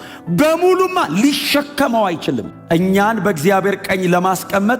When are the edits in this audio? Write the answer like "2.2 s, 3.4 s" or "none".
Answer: 2.5 s